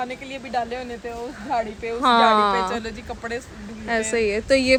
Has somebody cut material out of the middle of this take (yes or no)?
no